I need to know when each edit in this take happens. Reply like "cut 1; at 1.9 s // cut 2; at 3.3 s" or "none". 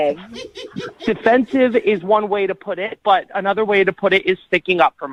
none

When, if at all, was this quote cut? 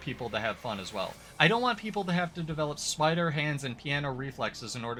none

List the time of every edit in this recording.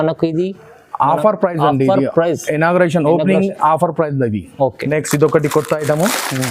none

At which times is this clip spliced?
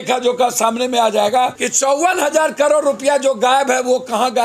cut 1; at 1.6 s

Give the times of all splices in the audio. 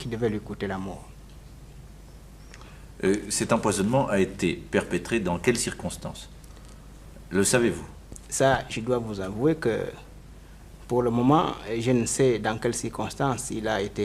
cut 1; at 5.9 s

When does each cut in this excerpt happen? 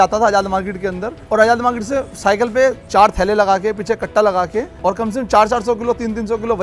cut 1; at 1.1 s // cut 2; at 2.8 s // cut 3; at 4.7 s

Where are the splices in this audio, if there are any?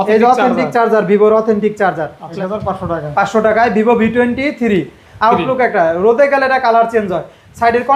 cut 1; at 2.2 s

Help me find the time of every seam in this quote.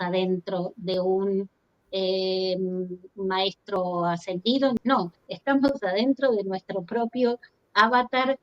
cut 1; at 4.8 s

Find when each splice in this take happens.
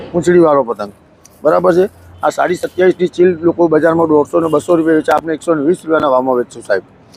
none

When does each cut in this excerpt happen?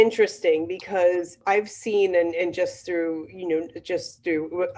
cut 1; at 1.3 s

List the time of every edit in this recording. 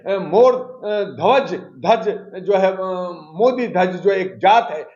none

